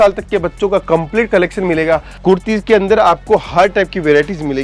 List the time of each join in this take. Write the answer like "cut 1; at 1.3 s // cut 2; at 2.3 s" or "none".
cut 1; at 2.1 s